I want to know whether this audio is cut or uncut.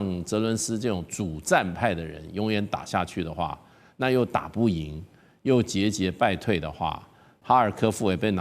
cut